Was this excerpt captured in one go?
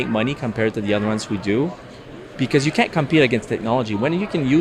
yes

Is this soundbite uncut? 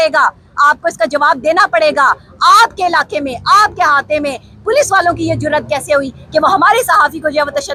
yes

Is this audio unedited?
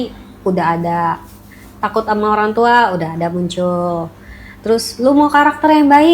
yes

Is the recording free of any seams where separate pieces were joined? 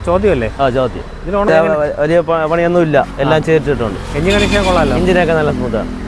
no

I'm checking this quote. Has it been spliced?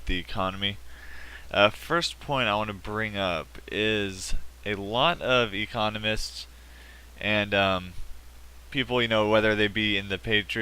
yes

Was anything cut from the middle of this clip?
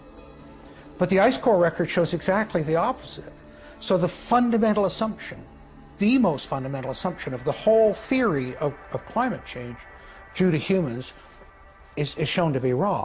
no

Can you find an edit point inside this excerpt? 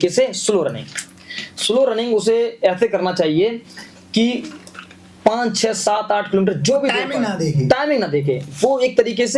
no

